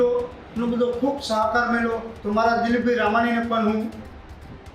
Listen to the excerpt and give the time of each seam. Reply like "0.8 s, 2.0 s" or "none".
2.1 s